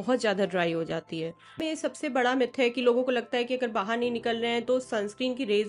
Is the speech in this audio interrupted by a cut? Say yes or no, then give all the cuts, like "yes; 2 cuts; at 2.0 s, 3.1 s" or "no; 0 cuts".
yes; 1 cut; at 1.6 s